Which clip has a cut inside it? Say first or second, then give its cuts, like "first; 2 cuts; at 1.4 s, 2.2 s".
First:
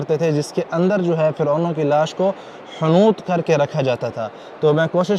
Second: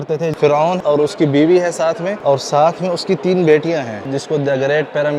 second; 3 cuts; at 0.8 s, 2.1 s, 4.1 s